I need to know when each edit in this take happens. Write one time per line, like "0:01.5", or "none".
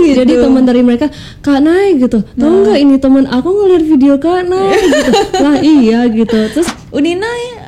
0:06.7